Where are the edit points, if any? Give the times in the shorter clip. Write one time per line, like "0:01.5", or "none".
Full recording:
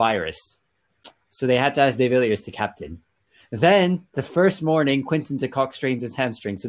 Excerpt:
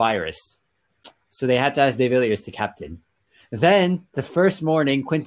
none